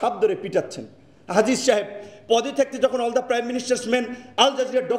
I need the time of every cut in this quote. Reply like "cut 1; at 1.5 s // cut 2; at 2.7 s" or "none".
none